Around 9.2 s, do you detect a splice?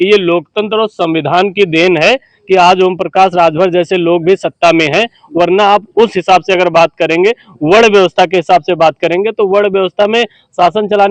no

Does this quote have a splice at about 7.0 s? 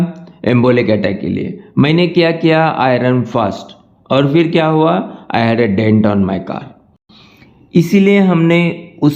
yes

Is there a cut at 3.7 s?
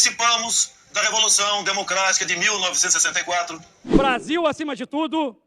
yes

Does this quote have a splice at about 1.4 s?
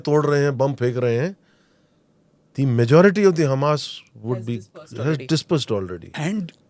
no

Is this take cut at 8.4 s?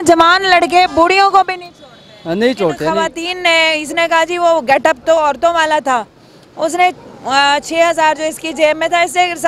no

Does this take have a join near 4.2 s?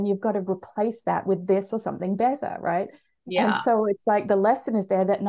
yes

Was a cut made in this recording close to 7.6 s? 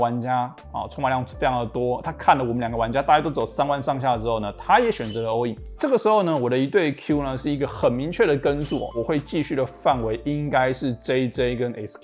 no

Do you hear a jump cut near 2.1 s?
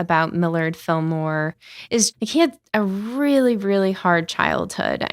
yes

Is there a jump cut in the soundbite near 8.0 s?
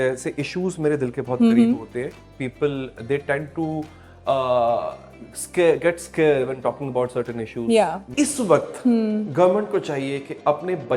yes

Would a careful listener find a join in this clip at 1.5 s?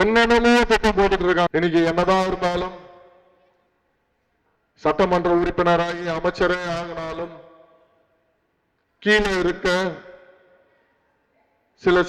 yes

